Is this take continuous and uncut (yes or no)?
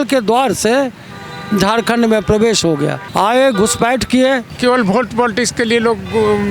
no